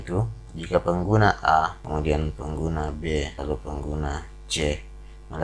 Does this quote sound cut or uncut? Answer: cut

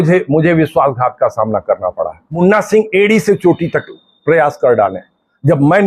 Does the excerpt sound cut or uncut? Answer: cut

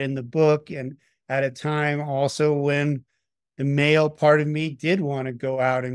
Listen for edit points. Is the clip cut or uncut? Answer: uncut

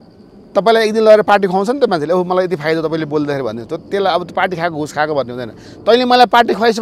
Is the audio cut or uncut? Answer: uncut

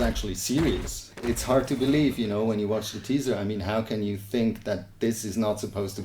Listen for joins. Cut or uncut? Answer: cut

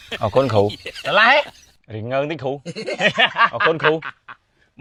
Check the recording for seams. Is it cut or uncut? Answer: uncut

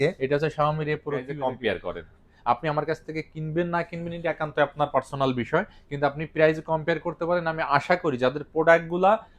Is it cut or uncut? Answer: cut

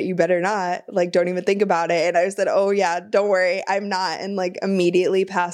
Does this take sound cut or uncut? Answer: uncut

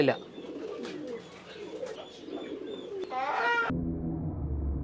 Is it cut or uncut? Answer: cut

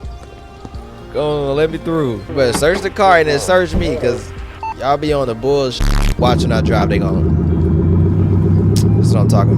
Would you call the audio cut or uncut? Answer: cut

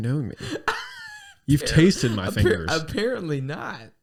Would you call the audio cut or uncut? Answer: uncut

